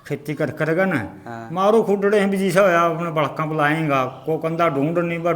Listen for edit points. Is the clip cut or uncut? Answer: uncut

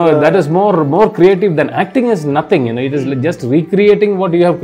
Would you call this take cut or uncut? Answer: uncut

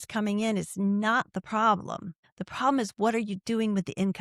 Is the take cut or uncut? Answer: uncut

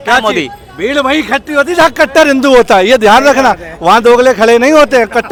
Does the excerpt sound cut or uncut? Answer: uncut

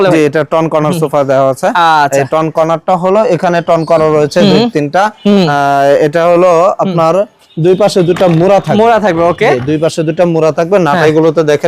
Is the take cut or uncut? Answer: uncut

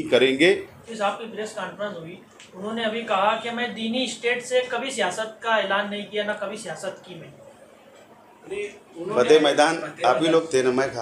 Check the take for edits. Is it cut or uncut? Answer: cut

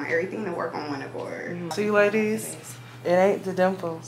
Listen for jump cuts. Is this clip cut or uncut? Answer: cut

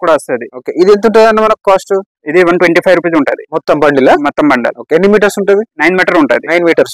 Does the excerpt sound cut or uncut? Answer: uncut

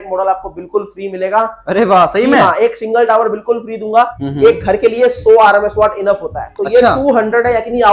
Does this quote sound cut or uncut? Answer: cut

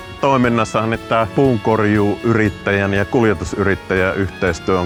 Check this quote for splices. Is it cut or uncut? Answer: uncut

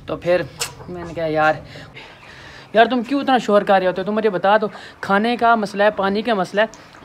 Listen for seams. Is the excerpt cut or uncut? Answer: cut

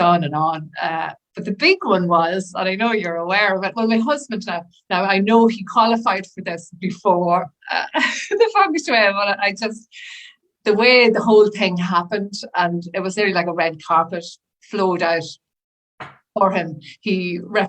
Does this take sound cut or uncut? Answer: uncut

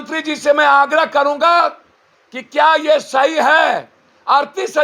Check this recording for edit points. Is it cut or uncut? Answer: uncut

